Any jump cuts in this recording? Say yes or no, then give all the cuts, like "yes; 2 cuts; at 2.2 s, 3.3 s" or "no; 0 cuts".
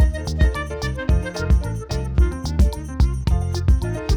no; 0 cuts